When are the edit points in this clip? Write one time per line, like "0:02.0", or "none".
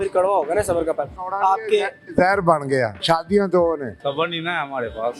0:01.2
0:03.0
0:03.9